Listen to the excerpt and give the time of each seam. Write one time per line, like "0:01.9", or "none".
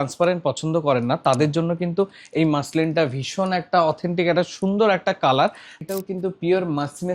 0:05.7